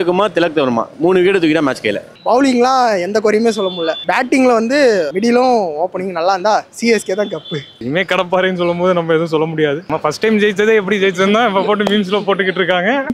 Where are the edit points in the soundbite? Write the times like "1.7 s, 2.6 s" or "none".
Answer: 2.1 s, 7.7 s